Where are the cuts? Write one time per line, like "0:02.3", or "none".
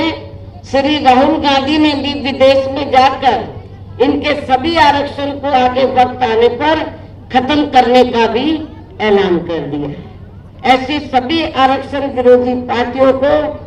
none

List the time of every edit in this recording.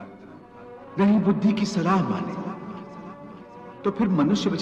none

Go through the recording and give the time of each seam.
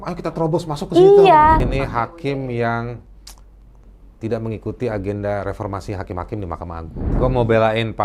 0:01.7
0:07.1

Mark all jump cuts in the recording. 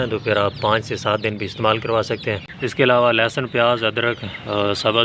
0:02.5

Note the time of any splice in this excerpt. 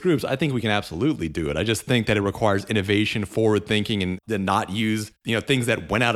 0:04.2
0:05.1

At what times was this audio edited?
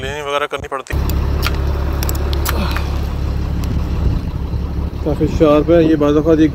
0:00.9

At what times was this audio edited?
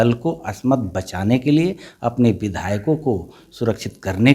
none

